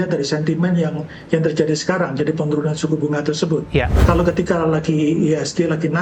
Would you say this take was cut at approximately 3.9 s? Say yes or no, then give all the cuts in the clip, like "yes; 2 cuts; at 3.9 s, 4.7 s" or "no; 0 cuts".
yes; 1 cut; at 3.9 s